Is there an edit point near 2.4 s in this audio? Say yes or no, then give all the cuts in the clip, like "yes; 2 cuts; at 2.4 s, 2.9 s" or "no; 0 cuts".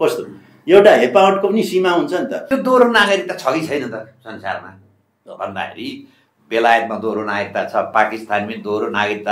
yes; 1 cut; at 2.4 s